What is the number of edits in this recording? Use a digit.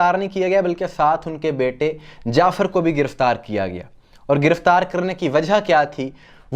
0